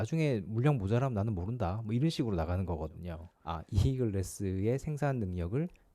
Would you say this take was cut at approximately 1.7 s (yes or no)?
no